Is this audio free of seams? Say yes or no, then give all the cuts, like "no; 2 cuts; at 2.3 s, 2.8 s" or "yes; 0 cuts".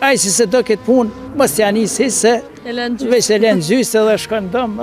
yes; 0 cuts